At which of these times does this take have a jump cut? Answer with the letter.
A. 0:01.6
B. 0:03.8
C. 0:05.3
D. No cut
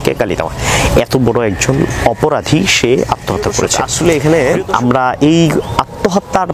B